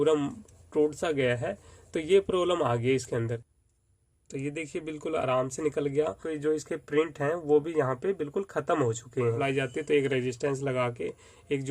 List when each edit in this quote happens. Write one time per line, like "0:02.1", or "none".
0:03.6
0:06.3
0:09.4